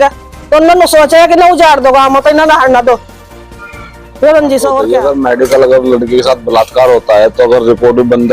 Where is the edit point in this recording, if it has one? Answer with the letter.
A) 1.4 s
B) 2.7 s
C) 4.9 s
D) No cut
C